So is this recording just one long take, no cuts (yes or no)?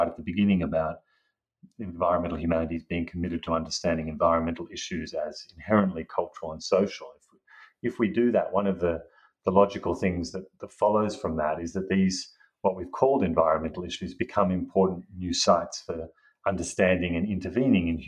yes